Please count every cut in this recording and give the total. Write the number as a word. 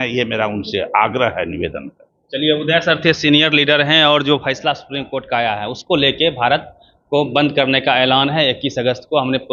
zero